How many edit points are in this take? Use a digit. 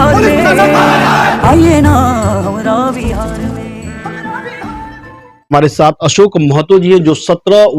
1